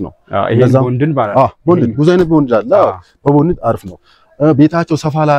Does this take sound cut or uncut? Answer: uncut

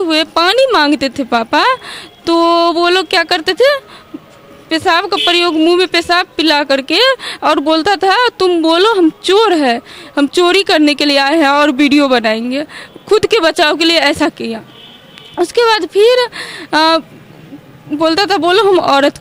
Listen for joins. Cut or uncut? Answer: uncut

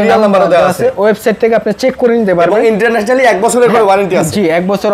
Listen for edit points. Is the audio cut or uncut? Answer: uncut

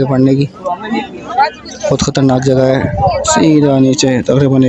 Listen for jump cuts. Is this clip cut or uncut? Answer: uncut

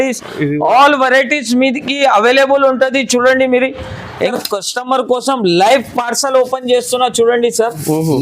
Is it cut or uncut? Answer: cut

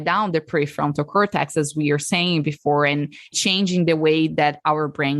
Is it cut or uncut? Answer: cut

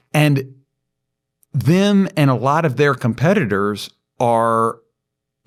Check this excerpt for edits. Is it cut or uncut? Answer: uncut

